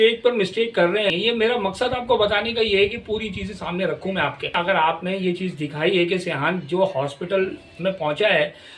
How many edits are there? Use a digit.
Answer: 2